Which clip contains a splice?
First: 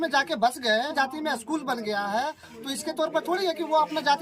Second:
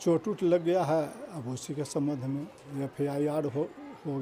first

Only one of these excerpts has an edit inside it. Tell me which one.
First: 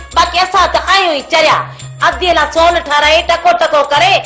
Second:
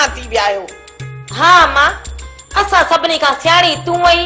second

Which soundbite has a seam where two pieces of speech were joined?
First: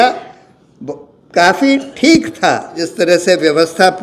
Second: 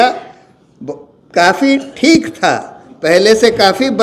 first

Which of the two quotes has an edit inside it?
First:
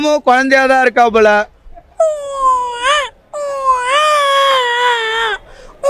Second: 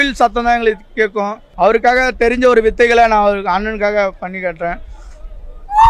second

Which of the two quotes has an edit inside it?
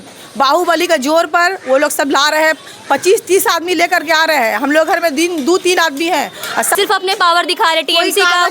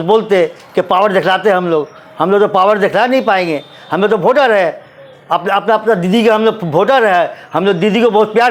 first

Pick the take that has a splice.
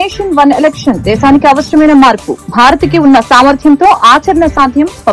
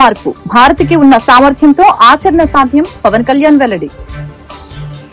second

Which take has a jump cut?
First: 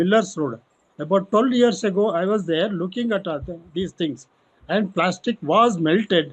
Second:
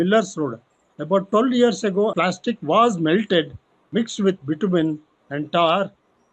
second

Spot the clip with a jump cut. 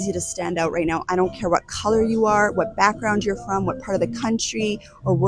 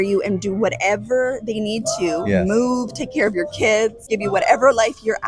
second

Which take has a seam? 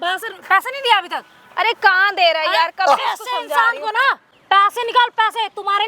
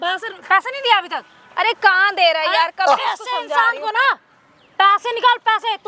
first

